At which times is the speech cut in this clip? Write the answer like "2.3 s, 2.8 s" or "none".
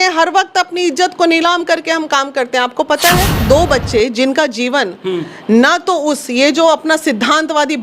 3.4 s